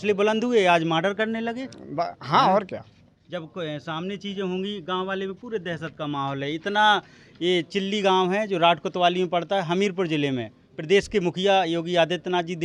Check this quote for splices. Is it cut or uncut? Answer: uncut